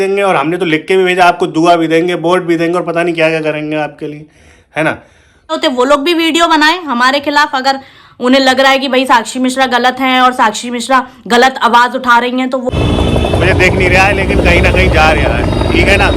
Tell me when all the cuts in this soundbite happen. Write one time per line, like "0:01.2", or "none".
0:05.6
0:12.7